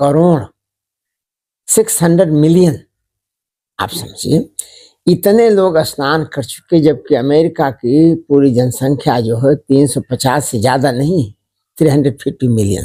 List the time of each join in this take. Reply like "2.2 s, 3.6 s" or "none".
none